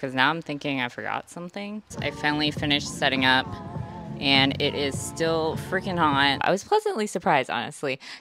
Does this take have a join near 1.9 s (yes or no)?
yes